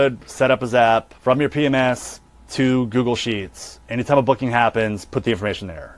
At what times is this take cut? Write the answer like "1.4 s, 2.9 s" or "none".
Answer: 1.1 s